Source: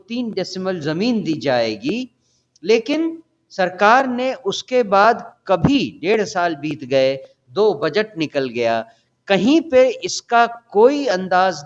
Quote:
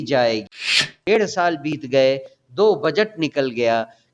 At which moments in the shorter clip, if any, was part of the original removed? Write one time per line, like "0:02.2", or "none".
0:01.0